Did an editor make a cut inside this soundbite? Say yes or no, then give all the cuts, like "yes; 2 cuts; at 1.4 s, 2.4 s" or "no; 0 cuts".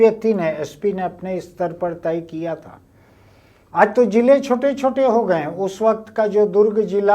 no; 0 cuts